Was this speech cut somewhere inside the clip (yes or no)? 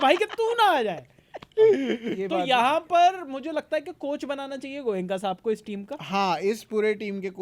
no